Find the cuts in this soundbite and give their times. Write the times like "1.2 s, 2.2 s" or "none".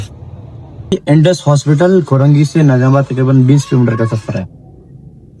0.9 s